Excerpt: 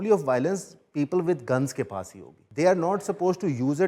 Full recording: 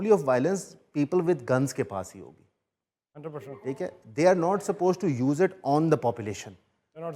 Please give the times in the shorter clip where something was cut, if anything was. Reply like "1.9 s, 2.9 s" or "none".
2.4 s